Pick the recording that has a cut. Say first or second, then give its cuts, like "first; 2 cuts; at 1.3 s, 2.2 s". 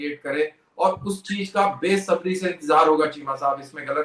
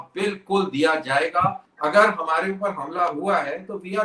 second; 1 cut; at 1.7 s